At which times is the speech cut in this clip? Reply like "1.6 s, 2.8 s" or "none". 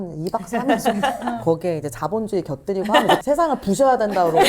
3.2 s

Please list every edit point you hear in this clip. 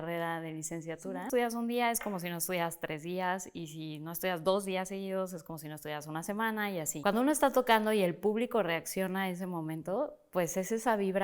1.0 s, 6.9 s

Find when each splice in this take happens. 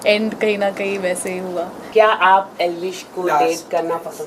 1.9 s

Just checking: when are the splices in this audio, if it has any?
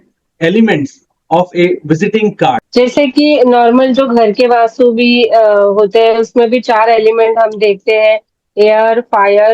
2.6 s

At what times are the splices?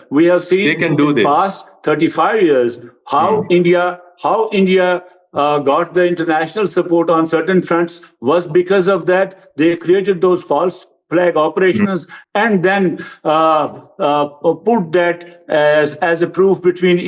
none

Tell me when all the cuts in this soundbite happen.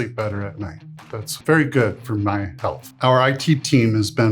1.3 s, 2.9 s

